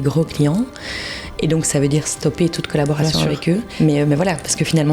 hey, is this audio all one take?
no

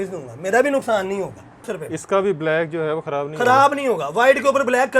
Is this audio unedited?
no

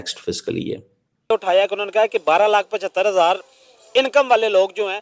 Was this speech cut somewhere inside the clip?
yes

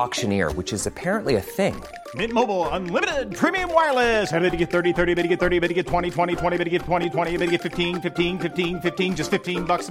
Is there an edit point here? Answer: no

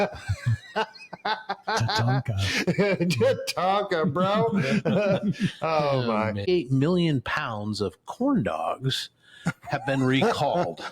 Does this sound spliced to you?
yes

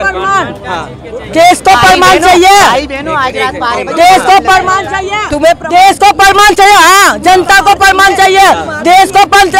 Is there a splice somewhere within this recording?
no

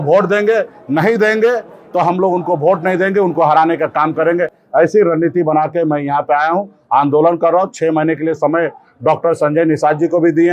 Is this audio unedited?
yes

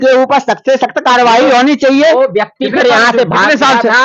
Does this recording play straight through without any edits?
yes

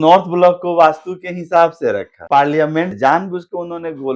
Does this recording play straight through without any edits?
no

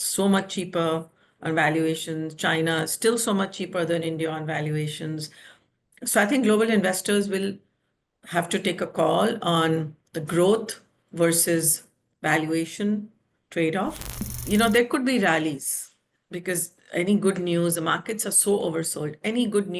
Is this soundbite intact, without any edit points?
no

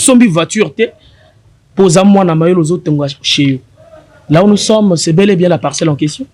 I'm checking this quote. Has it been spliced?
no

